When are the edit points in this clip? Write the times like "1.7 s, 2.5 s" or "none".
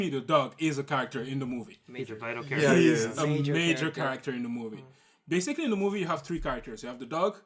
2.9 s